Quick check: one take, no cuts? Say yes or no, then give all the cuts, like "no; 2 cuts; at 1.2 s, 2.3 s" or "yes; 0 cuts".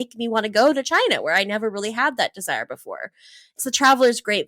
no; 1 cut; at 3.5 s